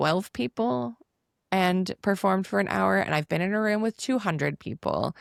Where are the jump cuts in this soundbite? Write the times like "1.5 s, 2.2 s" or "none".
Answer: none